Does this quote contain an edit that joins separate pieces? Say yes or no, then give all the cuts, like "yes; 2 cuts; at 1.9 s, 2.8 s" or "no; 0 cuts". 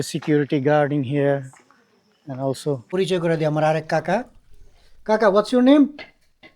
yes; 1 cut; at 2.8 s